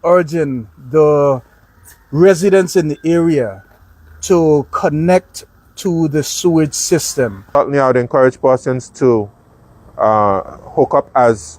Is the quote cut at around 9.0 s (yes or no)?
no